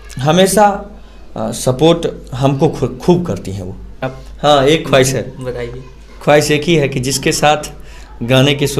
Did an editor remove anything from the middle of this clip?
yes; 1 cut; at 4.2 s

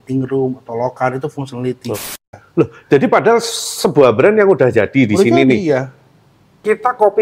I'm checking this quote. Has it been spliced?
yes; 1 cut; at 2.1 s

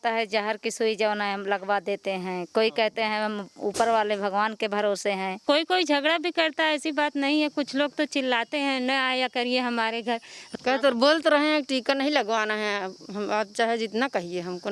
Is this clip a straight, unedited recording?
yes; 0 cuts

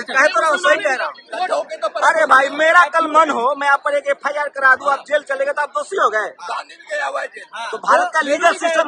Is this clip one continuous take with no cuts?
no; 1 cut; at 1.2 s

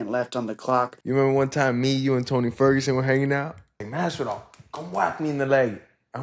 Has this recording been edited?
yes; 2 cuts; at 1.0 s, 3.9 s

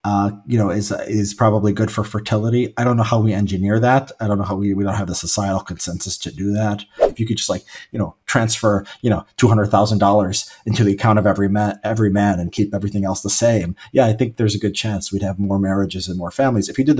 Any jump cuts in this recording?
yes; 1 cut; at 7.1 s

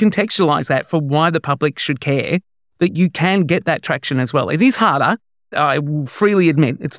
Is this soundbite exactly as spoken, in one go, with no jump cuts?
no; 1 cut; at 5.5 s

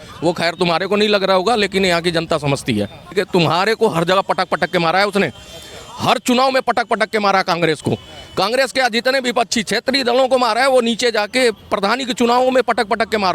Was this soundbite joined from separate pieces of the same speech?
yes; 1 cut; at 3.1 s

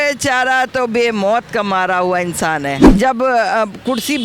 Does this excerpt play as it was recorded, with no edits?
no; 1 cut; at 2.9 s

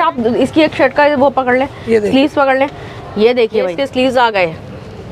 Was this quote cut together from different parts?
yes; 1 cut; at 3.8 s

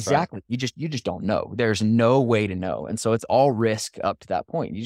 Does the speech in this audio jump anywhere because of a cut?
no; 0 cuts

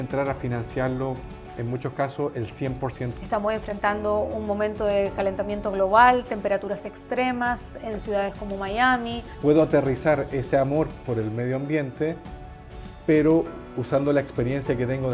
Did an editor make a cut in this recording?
yes; 2 cuts; at 3.1 s, 9.3 s

